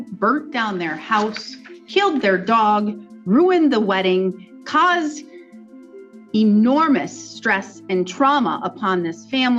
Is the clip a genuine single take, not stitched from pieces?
yes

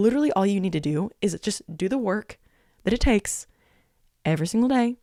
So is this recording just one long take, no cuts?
yes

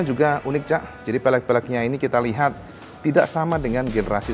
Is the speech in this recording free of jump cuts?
yes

